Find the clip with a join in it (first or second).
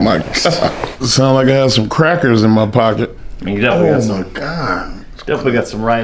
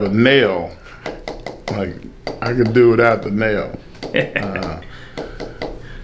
first